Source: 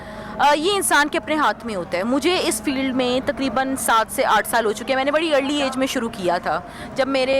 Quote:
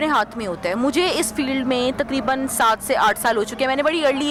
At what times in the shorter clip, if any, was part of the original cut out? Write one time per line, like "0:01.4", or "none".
none